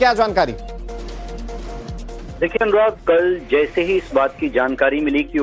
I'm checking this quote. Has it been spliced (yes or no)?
yes